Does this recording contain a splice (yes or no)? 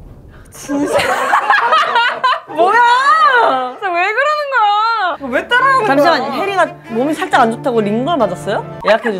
no